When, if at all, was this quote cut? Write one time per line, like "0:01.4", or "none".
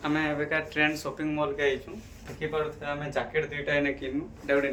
none

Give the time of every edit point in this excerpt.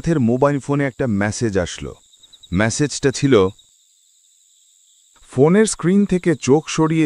0:05.2

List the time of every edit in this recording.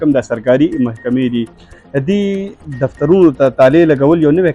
none

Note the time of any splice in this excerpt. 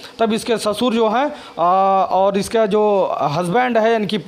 none

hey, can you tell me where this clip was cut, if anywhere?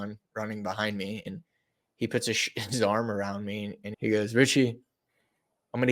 0:01.3
0:03.8

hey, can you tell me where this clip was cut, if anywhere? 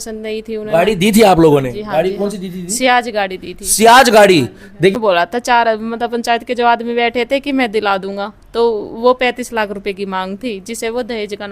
0:04.9

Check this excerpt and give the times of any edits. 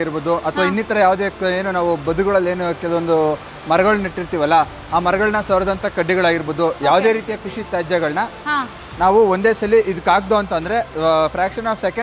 none

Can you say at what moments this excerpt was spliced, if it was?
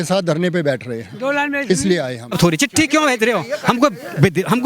0:02.1

